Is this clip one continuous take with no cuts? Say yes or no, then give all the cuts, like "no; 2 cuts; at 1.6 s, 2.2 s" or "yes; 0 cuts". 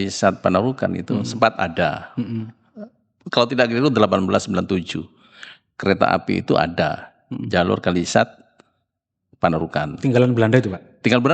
yes; 0 cuts